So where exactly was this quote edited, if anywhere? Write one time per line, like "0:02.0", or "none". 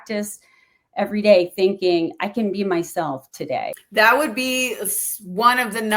0:03.8